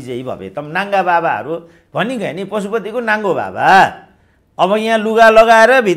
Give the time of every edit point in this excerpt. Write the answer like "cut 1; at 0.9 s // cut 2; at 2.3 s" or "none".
none